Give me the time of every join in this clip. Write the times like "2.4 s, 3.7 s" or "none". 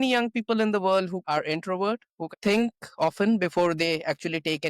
1.2 s, 2.3 s